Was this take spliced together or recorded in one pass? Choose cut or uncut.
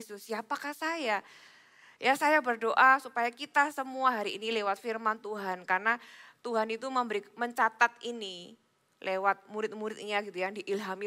uncut